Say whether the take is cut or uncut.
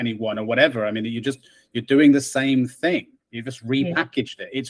uncut